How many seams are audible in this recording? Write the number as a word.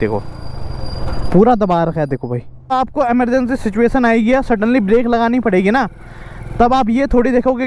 one